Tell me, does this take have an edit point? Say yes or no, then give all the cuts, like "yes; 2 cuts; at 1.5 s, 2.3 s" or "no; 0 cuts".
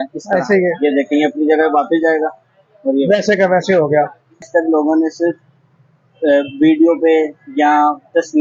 yes; 1 cut; at 4.4 s